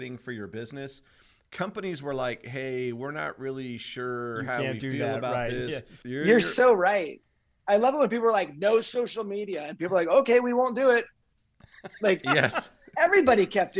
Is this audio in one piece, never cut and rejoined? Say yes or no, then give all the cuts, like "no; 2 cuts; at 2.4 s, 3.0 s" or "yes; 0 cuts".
no; 1 cut; at 6.0 s